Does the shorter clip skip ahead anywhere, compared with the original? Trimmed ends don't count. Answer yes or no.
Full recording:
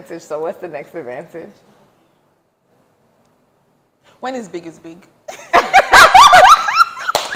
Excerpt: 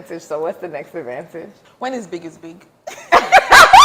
yes